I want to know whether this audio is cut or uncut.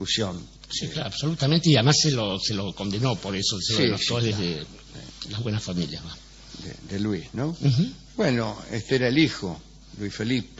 uncut